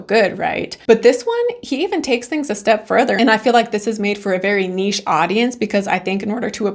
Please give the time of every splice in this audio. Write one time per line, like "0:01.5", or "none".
none